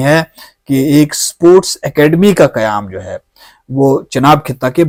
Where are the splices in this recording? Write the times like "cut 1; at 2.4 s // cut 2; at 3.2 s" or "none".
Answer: none

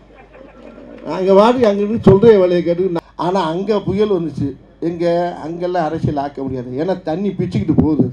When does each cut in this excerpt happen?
cut 1; at 3.0 s

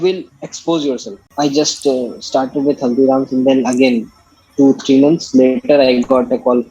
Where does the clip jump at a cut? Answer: cut 1; at 1.2 s

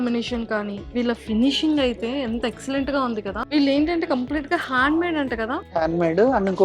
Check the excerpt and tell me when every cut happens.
cut 1; at 0.9 s // cut 2; at 3.4 s // cut 3; at 5.6 s

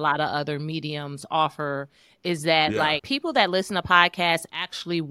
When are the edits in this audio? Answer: cut 1; at 3.1 s

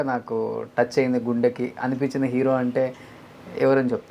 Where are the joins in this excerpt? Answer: none

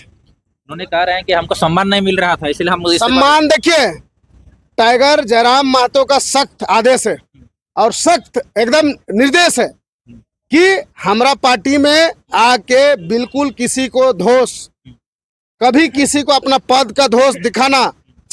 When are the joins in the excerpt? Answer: none

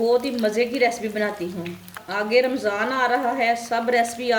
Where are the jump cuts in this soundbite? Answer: cut 1; at 2.0 s

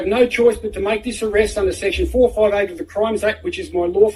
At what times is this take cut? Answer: none

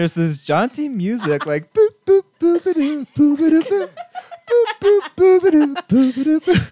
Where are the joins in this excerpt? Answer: none

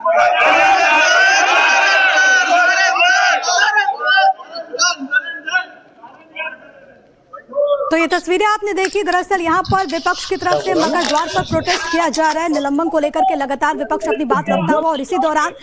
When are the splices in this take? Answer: cut 1; at 1.5 s

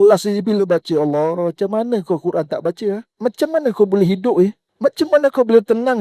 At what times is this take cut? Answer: cut 1; at 3.1 s // cut 2; at 4.6 s

